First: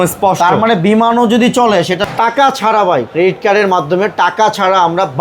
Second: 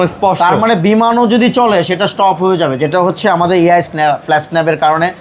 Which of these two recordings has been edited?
first; 1 cut; at 2.1 s

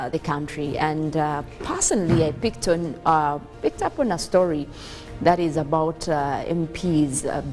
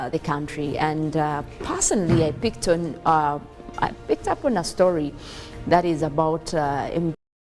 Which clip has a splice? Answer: first; 2 cuts; at 3.5 s, 6.7 s

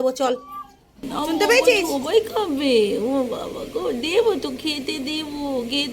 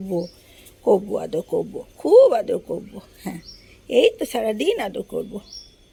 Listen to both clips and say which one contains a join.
first; 1 cut; at 2.0 s

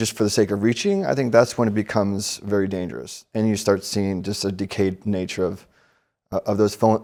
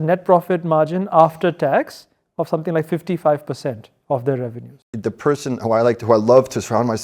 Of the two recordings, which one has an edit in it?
second; 1 cut; at 4.9 s

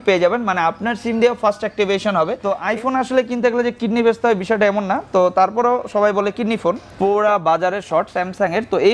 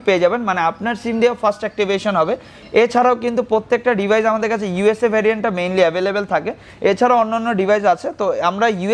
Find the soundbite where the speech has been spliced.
first; 2 cuts; at 2.5 s, 6.9 s

